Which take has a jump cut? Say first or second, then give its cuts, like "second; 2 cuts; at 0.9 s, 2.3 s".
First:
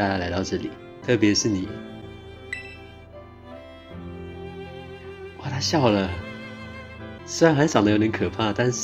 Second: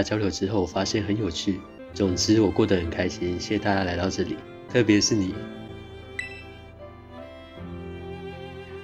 second; 1 cut; at 1.7 s